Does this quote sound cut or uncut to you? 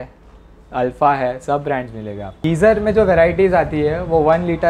cut